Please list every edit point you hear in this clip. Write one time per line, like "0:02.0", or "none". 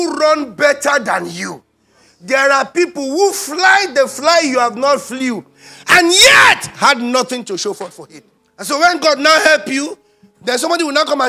none

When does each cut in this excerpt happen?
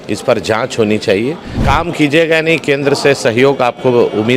0:01.5

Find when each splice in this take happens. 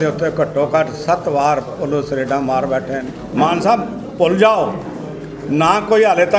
0:03.2

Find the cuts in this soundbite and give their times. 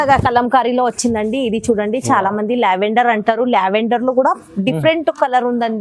none

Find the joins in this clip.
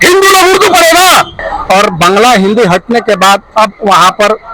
0:01.5

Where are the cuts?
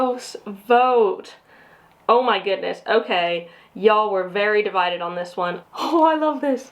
0:05.6

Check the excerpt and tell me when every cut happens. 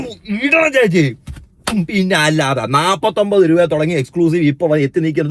none

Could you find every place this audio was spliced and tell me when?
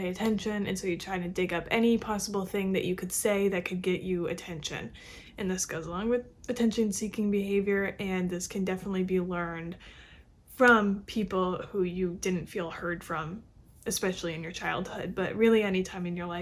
none

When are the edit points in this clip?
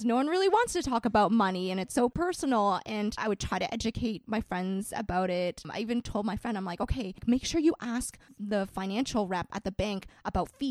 0:02.1
0:03.2
0:05.7
0:07.2

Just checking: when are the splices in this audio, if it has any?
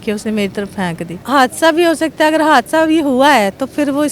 0:01.1

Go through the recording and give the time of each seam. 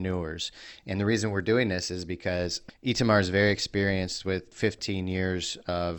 0:02.6
0:04.5

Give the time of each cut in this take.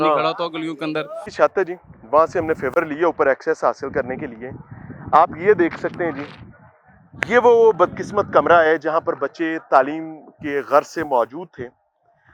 none

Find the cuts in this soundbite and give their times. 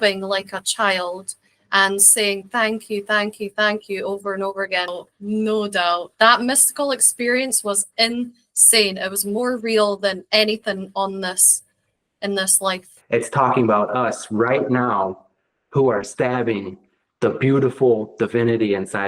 0:05.0
0:12.9

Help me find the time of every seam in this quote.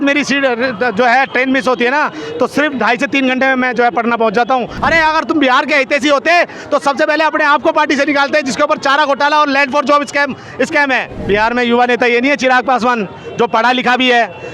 0:04.7
0:11.1

